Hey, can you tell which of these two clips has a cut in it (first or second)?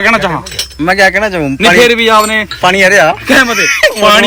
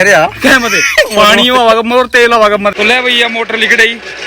second